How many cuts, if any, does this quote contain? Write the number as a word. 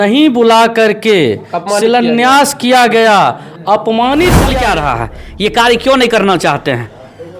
one